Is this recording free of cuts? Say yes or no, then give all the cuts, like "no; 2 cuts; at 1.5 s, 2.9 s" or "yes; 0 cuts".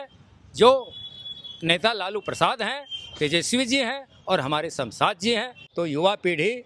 no; 1 cut; at 5.6 s